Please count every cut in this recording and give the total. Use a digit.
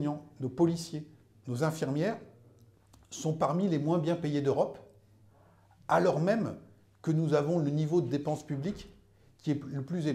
0